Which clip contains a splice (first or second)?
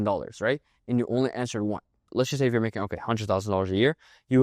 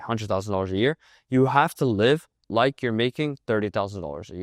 first